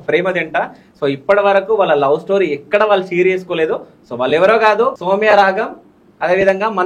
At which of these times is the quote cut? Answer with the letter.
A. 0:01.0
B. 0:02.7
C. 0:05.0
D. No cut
C